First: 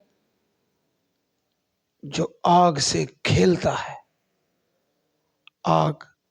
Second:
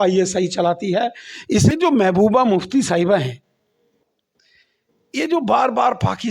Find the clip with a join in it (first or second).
second